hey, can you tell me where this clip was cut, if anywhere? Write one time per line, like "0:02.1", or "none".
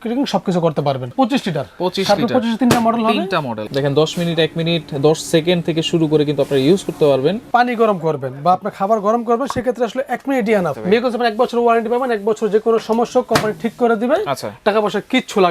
0:01.1
0:03.6
0:07.4
0:10.8